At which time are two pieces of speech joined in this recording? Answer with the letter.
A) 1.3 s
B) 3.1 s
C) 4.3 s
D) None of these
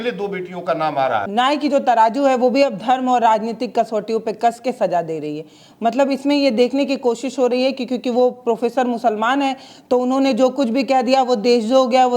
A